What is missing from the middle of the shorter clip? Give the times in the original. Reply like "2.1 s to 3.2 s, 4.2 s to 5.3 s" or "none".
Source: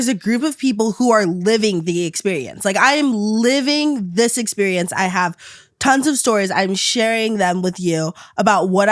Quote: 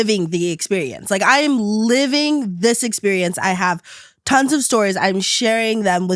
none